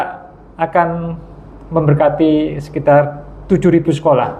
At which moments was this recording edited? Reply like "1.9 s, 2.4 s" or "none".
none